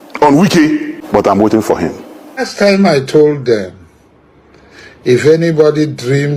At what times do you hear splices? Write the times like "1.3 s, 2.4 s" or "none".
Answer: 1.0 s, 2.5 s